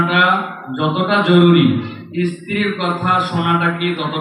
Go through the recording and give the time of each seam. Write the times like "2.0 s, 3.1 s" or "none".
none